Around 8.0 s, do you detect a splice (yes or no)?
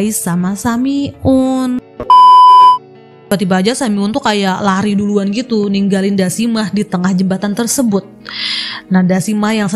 no